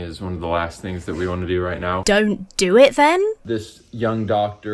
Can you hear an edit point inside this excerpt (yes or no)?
yes